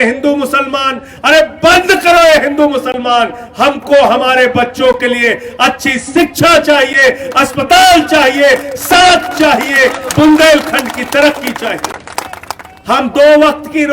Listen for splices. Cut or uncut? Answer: cut